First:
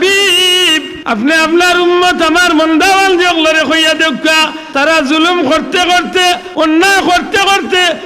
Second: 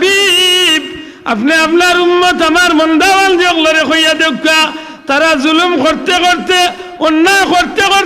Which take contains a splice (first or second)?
first